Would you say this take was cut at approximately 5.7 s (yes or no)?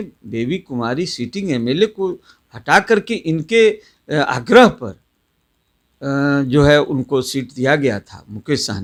no